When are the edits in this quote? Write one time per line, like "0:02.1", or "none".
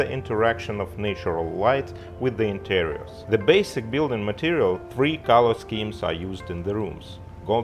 0:03.1
0:04.8